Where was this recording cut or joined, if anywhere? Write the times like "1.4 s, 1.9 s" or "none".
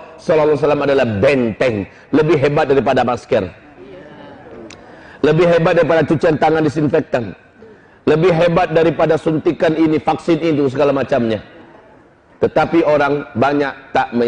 none

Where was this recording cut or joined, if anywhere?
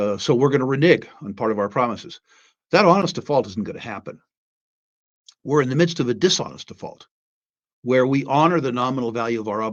none

